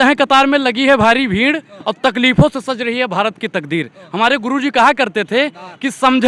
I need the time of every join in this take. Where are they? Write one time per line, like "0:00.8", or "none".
none